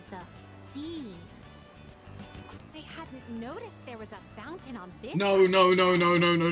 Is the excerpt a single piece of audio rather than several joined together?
no; 1 cut; at 2.6 s

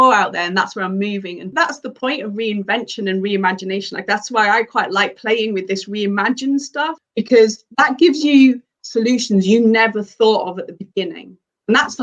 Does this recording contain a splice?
yes; 2 cuts; at 1.5 s, 7.0 s

